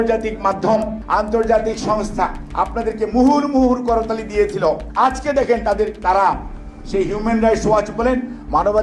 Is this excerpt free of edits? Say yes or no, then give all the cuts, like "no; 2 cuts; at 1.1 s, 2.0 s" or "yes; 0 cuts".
no; 3 cuts; at 0.9 s, 2.4 s, 4.9 s